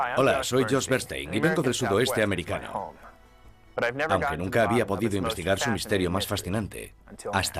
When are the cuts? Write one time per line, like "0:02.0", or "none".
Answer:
0:05.1